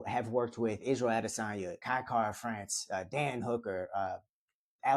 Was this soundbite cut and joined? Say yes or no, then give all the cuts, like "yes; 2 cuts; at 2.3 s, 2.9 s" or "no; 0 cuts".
yes; 1 cut; at 1.8 s